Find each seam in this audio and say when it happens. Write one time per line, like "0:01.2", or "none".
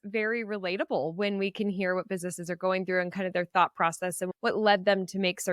0:04.3